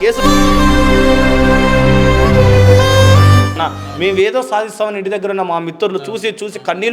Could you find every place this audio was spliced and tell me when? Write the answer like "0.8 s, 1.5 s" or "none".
3.6 s

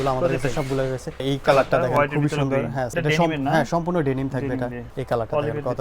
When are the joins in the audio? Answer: 1.2 s, 2.9 s, 4.9 s

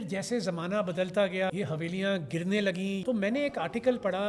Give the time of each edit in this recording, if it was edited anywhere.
1.5 s, 3.0 s

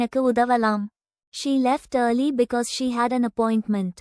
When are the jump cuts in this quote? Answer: 1.2 s

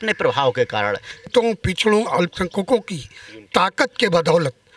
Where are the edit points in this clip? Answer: 1.3 s

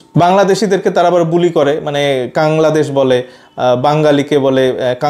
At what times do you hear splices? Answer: none

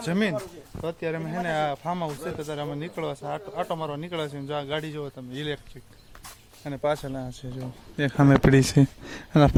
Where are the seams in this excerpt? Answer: none

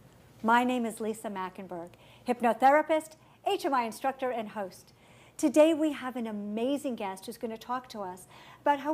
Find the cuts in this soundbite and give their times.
2.4 s

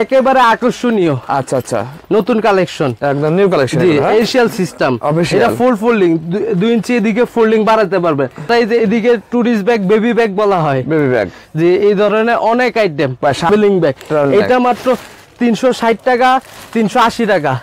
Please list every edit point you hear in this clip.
4.2 s, 8.5 s, 13.5 s

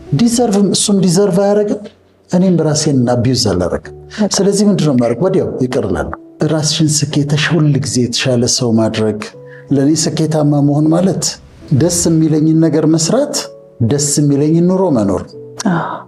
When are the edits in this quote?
6.2 s, 11.6 s

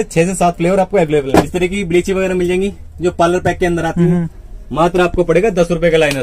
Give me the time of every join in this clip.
1.5 s, 4.4 s

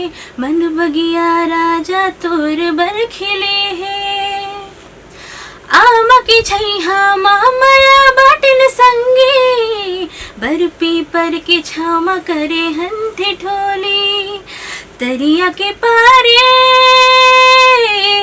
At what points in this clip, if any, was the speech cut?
none

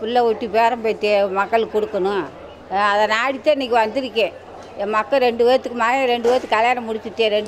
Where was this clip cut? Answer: none

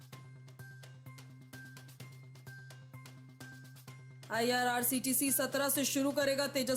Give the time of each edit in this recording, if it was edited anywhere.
1.6 s, 4.0 s

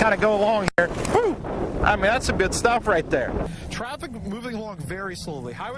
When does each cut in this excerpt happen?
3.5 s

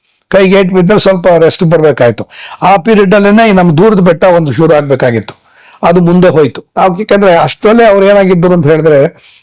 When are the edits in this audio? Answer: 6.6 s

